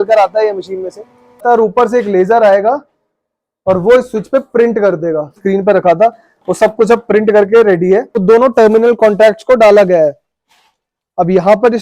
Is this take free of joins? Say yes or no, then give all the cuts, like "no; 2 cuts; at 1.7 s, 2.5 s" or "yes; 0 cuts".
no; 3 cuts; at 1.4 s, 5.4 s, 8.2 s